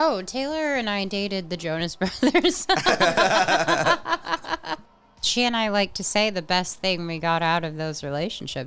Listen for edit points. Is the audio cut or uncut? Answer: uncut